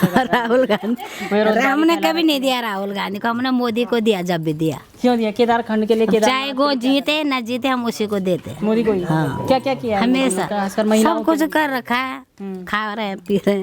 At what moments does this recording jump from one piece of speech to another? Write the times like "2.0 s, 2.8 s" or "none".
none